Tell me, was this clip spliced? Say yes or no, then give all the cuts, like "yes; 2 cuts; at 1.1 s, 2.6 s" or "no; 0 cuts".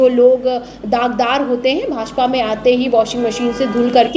no; 0 cuts